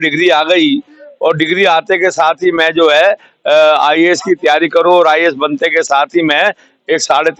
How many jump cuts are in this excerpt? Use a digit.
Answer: 0